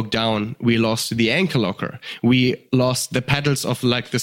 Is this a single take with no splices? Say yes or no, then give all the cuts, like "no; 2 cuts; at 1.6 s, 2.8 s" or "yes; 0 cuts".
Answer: no; 1 cut; at 2.6 s